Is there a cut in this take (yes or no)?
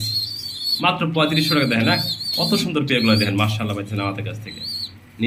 no